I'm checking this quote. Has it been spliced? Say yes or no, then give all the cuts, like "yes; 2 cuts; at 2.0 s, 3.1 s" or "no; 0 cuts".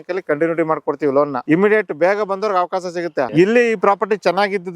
yes; 2 cuts; at 1.4 s, 3.3 s